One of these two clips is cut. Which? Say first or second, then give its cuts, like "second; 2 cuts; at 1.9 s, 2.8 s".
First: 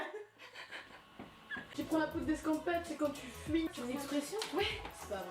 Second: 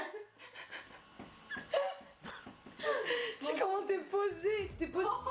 first; 1 cut; at 1.6 s